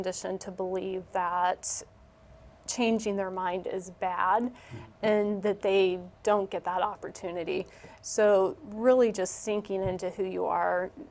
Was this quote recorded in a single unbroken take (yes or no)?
yes